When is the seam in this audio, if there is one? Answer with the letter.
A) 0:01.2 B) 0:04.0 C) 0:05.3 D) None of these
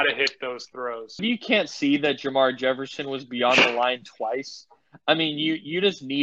A